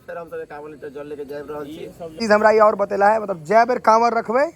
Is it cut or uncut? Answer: cut